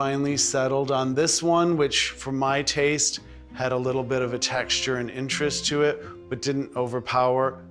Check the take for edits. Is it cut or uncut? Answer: uncut